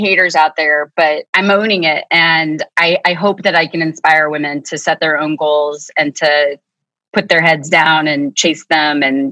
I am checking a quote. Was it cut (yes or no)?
yes